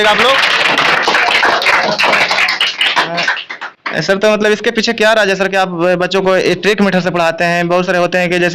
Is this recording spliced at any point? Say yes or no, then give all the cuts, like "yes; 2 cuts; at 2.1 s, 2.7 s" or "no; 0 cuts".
no; 0 cuts